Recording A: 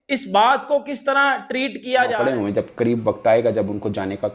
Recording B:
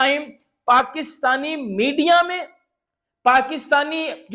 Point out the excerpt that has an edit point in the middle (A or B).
A